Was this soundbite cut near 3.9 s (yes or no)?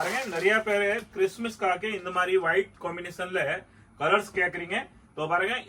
no